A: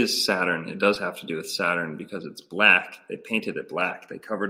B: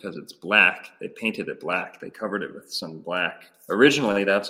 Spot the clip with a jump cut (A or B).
B